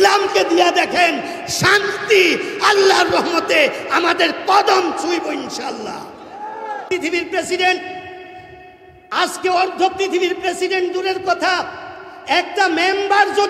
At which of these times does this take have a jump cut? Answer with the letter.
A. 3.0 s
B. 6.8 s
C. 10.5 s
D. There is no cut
B